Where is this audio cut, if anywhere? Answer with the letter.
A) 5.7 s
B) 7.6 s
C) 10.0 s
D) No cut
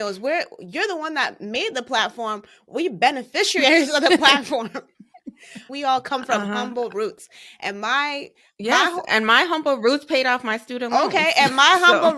A